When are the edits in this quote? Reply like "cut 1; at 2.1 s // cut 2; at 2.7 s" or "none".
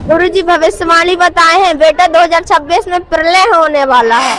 none